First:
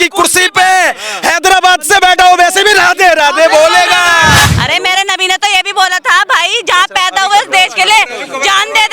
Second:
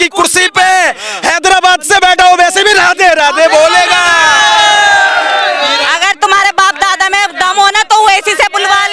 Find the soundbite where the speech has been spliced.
first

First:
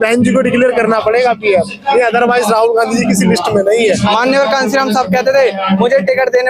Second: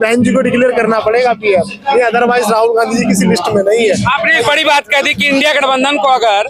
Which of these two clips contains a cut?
first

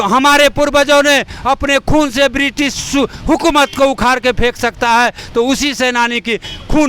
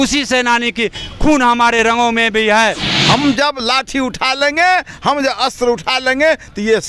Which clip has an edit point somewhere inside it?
second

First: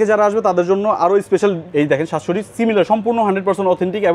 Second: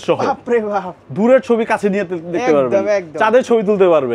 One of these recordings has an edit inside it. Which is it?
first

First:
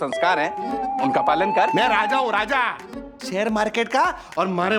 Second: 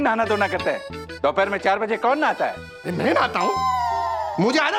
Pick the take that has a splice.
first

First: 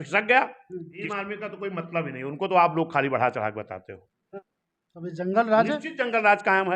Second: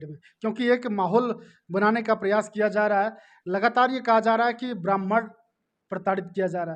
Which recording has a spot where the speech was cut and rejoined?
first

